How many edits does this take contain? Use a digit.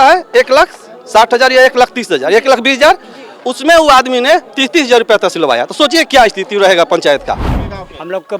1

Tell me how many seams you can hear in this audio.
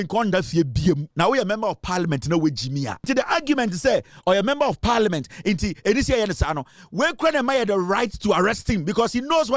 2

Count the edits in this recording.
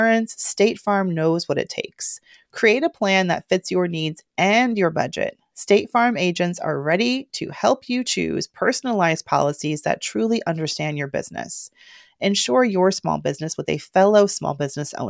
0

